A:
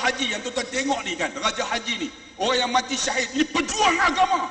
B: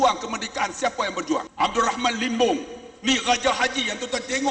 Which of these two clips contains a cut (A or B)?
B